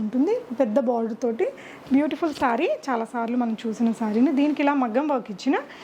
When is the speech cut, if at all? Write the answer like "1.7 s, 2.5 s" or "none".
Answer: none